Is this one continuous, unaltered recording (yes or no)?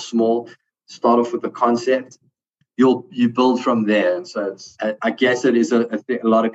no